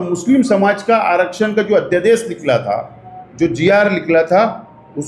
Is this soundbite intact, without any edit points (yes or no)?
yes